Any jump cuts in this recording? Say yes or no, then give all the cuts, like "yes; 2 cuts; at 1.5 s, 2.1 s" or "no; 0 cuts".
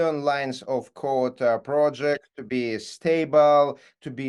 no; 0 cuts